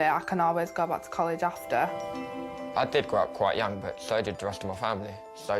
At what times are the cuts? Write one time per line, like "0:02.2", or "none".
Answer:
0:02.0